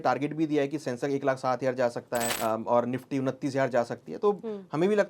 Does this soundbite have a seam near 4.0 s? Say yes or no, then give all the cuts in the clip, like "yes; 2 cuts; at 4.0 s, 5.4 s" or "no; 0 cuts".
no; 1 cut; at 2.3 s